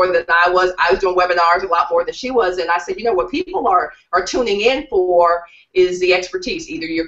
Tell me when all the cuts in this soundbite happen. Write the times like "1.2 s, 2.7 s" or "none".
4.8 s